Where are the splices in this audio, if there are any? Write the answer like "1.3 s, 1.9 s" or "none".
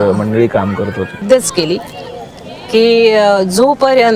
1.2 s